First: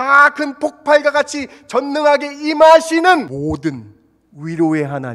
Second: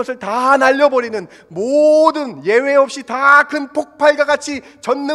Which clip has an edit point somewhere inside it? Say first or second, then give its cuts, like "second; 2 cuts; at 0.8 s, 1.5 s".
first; 1 cut; at 3.3 s